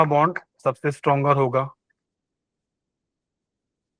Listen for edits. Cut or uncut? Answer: uncut